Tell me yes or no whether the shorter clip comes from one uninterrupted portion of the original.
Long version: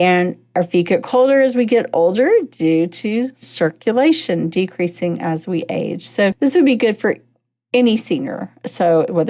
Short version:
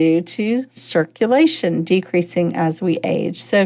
yes